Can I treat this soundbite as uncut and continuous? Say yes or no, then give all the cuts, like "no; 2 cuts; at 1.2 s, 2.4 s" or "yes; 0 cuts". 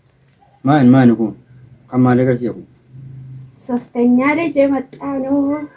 yes; 0 cuts